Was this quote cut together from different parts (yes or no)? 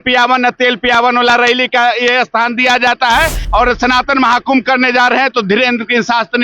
yes